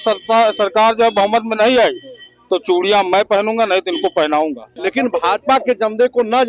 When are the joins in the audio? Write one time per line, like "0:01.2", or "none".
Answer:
0:04.7